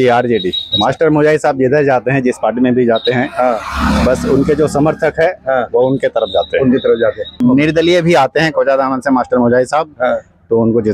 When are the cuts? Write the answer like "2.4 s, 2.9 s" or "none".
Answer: 7.4 s